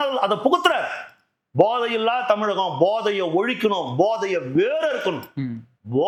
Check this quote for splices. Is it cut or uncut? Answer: uncut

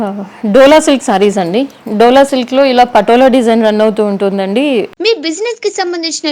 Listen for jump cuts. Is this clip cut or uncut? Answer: cut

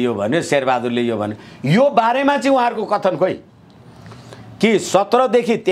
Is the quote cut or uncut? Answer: uncut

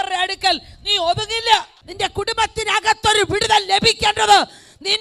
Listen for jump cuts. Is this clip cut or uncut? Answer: cut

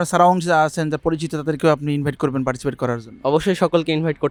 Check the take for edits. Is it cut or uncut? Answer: uncut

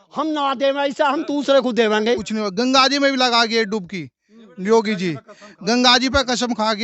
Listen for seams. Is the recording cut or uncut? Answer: cut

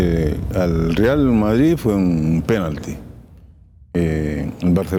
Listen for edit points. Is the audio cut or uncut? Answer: uncut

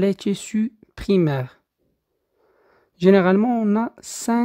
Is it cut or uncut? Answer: uncut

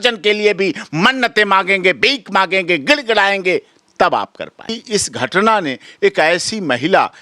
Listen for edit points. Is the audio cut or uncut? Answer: cut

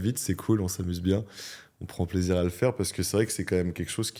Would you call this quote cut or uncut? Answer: uncut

